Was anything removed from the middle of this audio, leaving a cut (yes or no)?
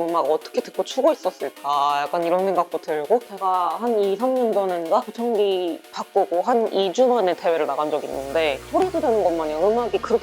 yes